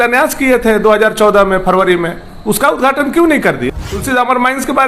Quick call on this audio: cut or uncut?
cut